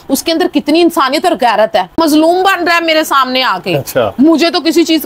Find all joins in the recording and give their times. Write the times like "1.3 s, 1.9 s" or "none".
2.0 s